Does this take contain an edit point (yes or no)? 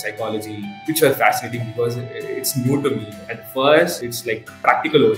yes